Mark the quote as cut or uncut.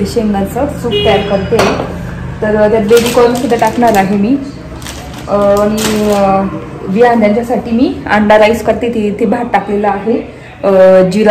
uncut